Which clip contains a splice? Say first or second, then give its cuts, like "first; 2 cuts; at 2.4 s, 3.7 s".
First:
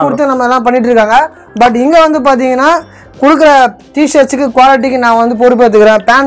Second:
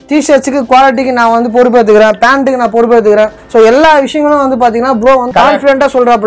second; 1 cut; at 5.3 s